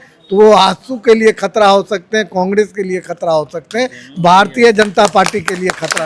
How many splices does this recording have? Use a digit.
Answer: 0